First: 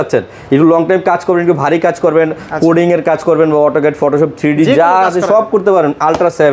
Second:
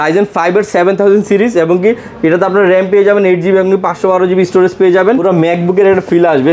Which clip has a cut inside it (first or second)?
second